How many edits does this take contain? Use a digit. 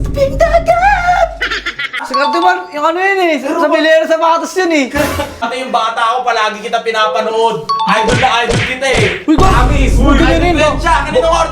2